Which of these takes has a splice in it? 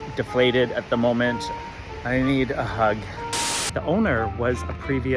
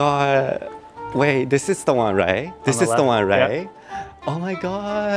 first; 2 cuts; at 1.5 s, 3.4 s

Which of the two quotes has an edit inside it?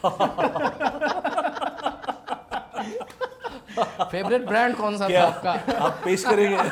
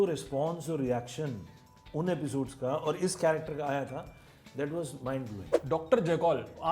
second; 1 cut; at 5.5 s

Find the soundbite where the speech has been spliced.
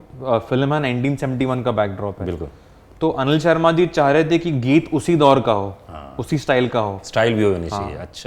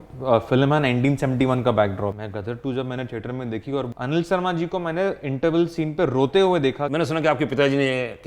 second; 3 cuts; at 2.2 s, 3.9 s, 6.8 s

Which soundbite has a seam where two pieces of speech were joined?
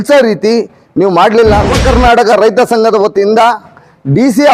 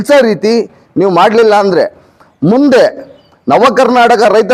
first; 1 cut; at 1.8 s

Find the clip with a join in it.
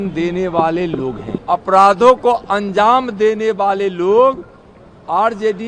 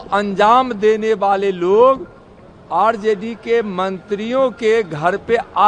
first; 1 cut; at 1.3 s

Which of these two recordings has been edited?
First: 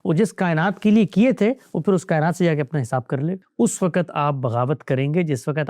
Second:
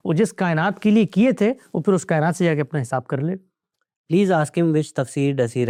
first; 1 cut; at 3.4 s

